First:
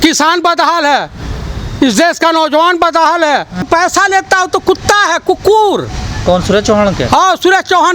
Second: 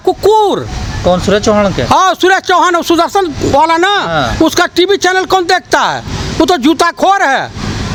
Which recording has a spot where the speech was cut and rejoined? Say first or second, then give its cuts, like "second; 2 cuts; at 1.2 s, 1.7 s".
first; 1 cut; at 3.7 s